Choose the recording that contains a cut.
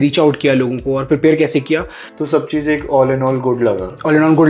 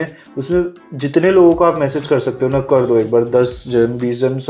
first; 1 cut; at 2.0 s

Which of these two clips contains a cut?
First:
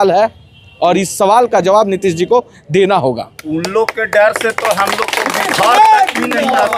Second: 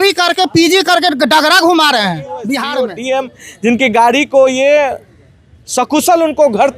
second; 1 cut; at 2.8 s

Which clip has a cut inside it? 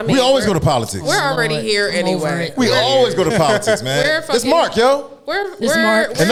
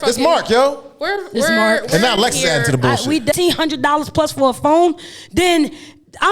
second; 1 cut; at 3.3 s

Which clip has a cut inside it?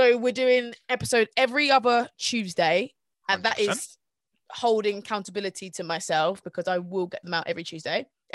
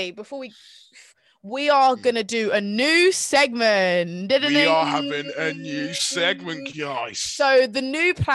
second; 1 cut; at 1.1 s

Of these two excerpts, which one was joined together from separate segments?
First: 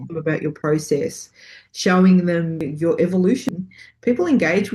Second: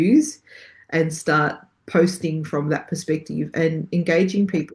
first; 1 cut; at 3.5 s

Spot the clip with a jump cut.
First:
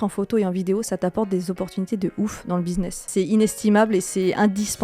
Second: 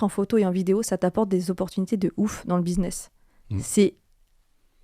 first; 1 cut; at 3.1 s

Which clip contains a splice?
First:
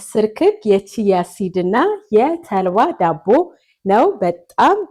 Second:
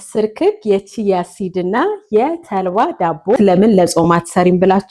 second; 1 cut; at 3.4 s

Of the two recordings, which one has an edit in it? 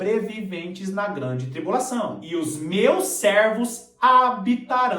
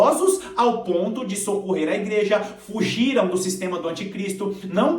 first; 1 cut; at 2.2 s

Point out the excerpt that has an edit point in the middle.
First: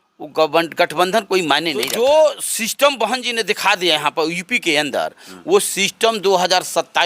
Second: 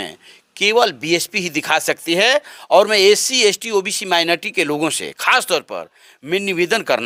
first; 1 cut; at 1.9 s

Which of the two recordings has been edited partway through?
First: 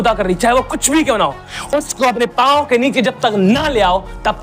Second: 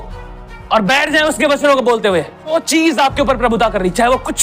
second; 1 cut; at 2.5 s

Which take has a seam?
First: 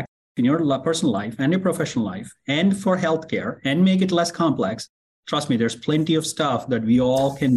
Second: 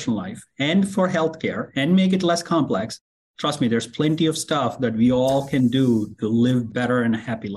second; 1 cut; at 6.7 s

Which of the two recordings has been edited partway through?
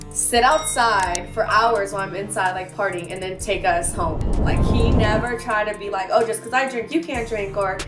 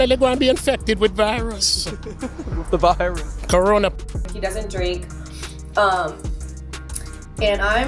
second; 1 cut; at 4.1 s

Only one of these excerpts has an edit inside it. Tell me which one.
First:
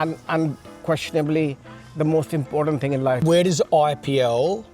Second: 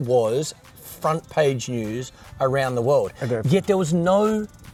first; 1 cut; at 3.2 s

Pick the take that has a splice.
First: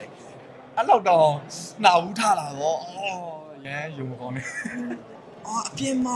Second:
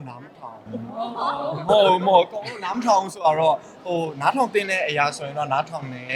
first; 1 cut; at 5.1 s

